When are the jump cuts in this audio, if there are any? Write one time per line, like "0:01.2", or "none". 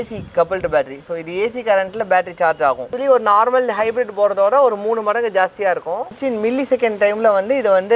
0:03.0
0:06.1